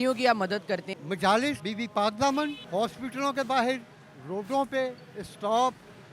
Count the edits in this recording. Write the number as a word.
three